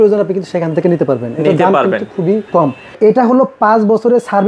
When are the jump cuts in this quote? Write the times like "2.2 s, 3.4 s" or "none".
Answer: 2.7 s